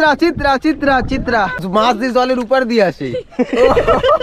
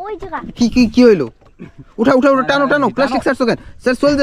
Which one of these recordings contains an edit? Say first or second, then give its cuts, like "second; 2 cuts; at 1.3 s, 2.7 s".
first; 1 cut; at 1.6 s